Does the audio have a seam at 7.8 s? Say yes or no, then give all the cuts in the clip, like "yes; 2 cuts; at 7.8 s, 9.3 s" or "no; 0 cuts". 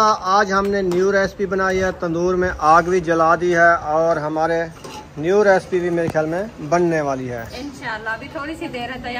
no; 0 cuts